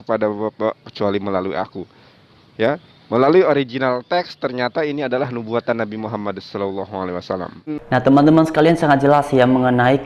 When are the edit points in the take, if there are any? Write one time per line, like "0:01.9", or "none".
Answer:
0:07.8